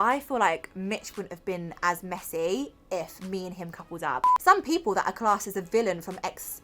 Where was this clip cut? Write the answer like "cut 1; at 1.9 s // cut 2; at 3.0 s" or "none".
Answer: cut 1; at 4.3 s